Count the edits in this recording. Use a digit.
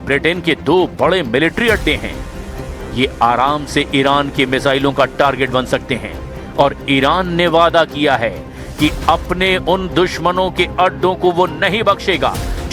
1